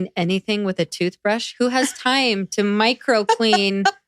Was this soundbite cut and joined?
no; 0 cuts

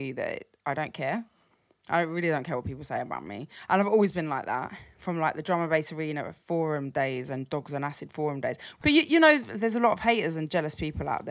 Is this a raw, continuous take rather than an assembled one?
no; 1 cut; at 8.7 s

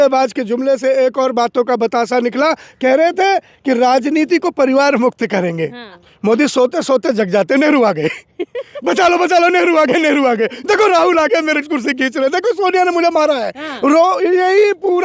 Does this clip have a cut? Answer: yes; 1 cut; at 5.9 s

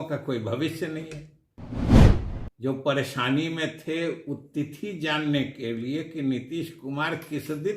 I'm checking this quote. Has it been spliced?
yes; 2 cuts; at 1.7 s, 2.2 s

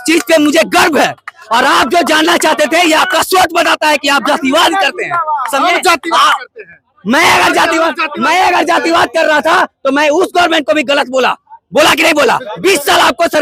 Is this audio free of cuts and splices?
yes; 0 cuts

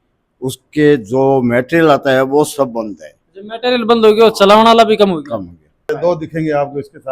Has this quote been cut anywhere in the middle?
yes; 1 cut; at 5.9 s

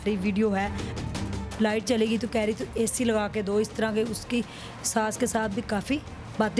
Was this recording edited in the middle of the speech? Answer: yes; 1 cut; at 1.1 s

